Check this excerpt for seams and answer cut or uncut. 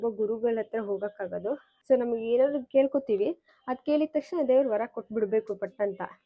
cut